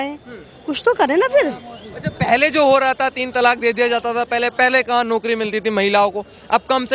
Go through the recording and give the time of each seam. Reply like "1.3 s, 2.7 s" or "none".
none